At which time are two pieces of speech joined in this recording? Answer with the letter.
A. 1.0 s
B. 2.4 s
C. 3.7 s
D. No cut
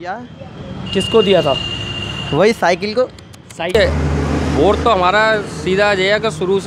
C